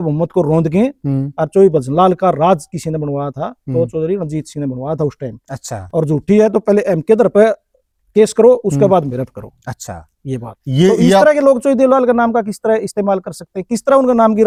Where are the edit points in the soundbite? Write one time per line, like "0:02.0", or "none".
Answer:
none